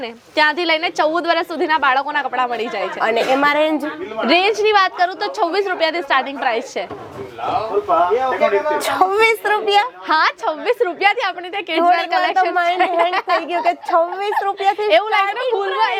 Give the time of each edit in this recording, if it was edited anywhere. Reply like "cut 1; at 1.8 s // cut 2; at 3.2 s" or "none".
none